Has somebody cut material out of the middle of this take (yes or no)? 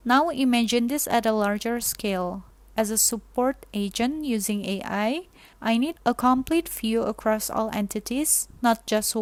no